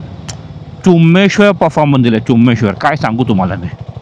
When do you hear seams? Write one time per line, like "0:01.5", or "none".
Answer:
none